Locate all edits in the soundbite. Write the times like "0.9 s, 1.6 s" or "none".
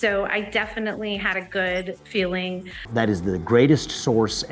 2.8 s